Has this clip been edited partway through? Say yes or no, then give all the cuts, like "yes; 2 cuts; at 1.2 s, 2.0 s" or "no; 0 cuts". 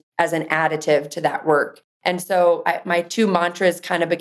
no; 0 cuts